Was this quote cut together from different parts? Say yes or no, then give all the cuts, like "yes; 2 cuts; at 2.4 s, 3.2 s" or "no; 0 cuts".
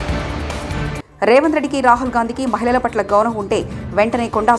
yes; 1 cut; at 1.0 s